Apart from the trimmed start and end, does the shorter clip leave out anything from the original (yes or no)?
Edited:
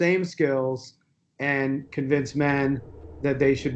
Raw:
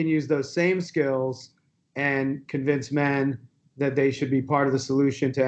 no